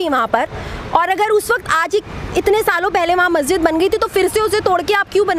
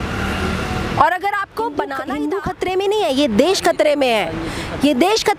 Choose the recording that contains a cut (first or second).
second